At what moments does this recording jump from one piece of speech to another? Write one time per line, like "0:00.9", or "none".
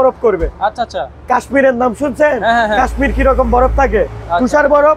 none

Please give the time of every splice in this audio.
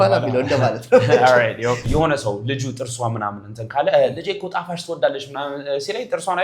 0:01.9

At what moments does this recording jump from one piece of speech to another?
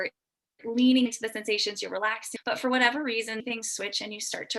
0:02.3
0:03.4

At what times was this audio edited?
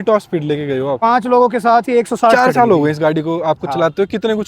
0:01.0
0:02.3

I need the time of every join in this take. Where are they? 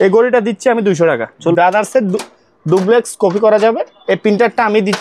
0:01.6
0:03.9

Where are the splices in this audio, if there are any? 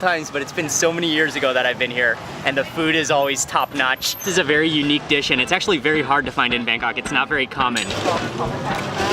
0:04.3
0:07.9

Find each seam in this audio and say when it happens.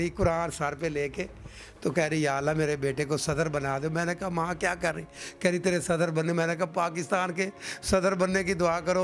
none

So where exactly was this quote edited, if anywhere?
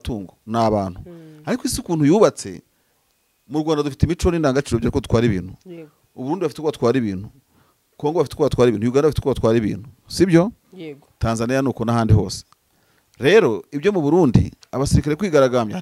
none

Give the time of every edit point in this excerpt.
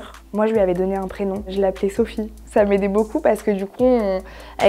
none

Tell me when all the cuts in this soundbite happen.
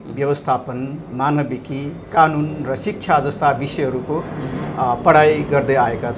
none

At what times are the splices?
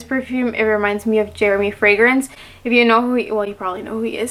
none

